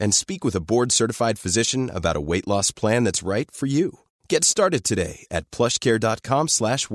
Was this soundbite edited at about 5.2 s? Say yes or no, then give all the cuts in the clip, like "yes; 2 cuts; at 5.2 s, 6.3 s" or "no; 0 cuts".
no; 0 cuts